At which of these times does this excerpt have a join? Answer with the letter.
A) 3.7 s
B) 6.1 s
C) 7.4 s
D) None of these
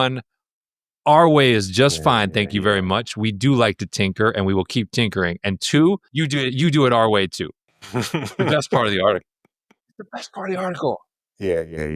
B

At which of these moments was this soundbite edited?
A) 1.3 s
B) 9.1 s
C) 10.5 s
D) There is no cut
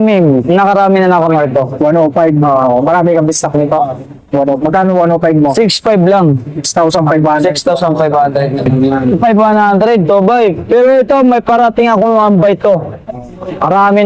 B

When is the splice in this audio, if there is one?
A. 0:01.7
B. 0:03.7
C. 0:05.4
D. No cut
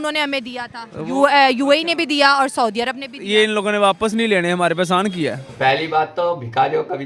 D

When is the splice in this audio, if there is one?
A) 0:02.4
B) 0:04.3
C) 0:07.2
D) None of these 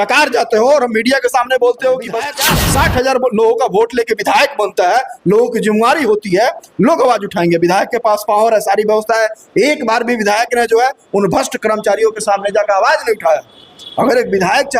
A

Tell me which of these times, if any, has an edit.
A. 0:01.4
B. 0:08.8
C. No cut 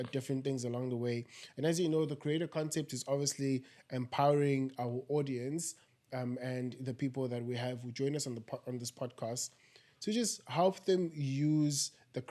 C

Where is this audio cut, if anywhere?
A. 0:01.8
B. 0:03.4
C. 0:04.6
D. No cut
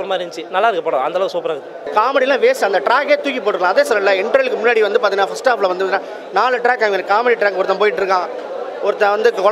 A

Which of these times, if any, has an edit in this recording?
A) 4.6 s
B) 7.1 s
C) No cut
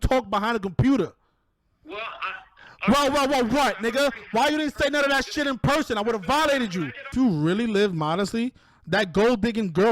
B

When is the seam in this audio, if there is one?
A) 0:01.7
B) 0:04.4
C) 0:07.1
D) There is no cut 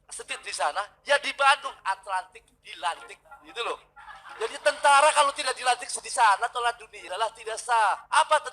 C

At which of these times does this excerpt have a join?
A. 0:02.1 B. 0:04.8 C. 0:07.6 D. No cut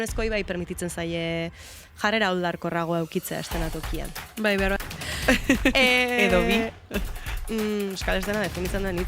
B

